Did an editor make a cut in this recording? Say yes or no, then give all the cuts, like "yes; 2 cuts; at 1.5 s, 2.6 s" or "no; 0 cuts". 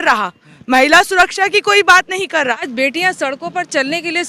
yes; 1 cut; at 2.7 s